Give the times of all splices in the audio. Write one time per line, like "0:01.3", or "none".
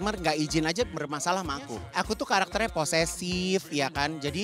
0:01.8